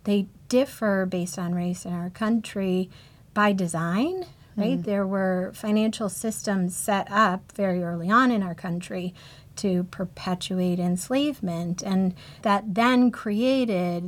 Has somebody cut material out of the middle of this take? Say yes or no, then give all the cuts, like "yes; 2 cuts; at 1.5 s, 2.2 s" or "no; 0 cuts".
yes; 2 cuts; at 4.8 s, 12.4 s